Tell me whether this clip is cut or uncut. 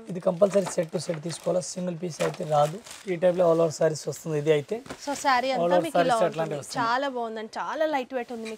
uncut